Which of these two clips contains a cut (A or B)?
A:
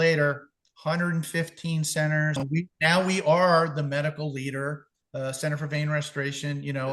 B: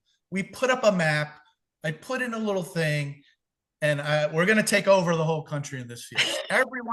A